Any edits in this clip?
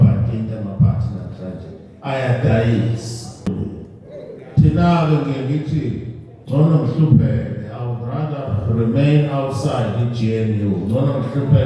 yes; 1 cut; at 3.5 s

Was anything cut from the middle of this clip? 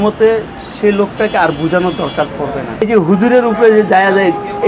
yes; 1 cut; at 2.9 s

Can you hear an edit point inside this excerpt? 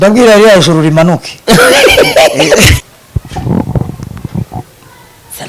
yes; 1 cut; at 2.8 s

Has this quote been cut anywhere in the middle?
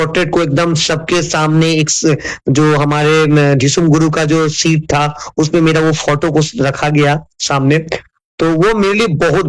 no; 0 cuts

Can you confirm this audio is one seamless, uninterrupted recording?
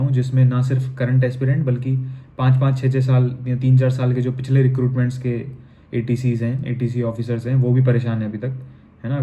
yes; 0 cuts

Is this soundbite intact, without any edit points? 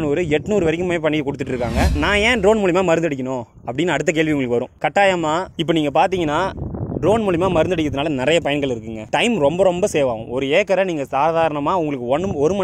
no; 1 cut; at 1.9 s

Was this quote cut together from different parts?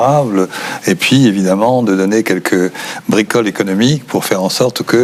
no; 0 cuts

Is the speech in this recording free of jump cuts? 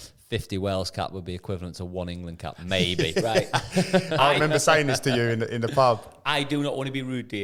yes; 0 cuts

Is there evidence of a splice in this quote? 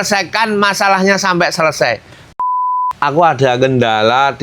yes; 1 cut; at 2.3 s

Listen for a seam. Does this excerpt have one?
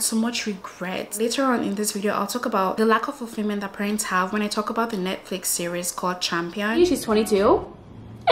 yes; 2 cuts; at 1.2 s, 6.8 s

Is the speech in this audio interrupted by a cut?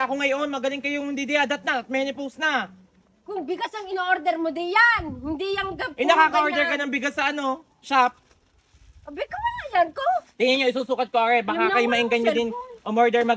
no; 0 cuts

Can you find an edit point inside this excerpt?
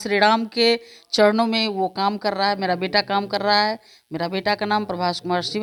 no; 0 cuts

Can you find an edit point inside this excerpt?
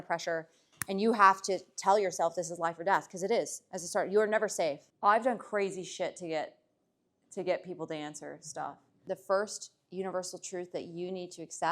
yes; 2 cuts; at 4.9 s, 9.0 s

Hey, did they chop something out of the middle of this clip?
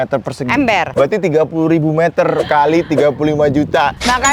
yes; 1 cut; at 0.9 s

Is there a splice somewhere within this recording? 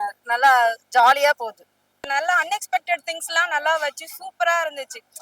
yes; 1 cut; at 2.1 s

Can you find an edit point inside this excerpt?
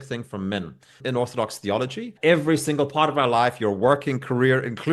yes; 2 cuts; at 1.0 s, 2.1 s

